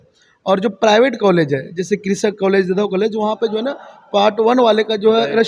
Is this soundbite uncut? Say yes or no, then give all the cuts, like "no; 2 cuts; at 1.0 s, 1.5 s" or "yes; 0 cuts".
yes; 0 cuts